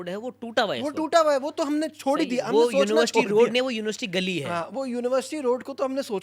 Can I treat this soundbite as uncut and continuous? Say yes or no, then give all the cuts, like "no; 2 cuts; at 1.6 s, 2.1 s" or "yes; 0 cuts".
yes; 0 cuts